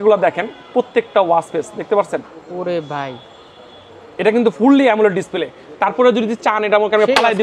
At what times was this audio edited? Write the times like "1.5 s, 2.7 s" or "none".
none

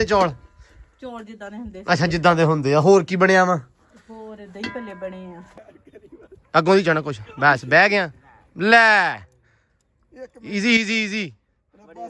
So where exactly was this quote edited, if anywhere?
5.5 s

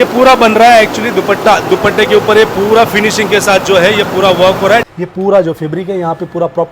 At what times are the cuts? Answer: 4.9 s

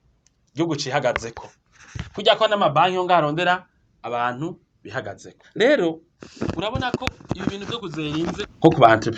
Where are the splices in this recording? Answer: none

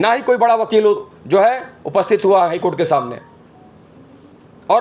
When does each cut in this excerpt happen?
none

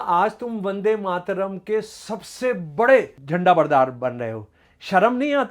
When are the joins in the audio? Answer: 3.2 s

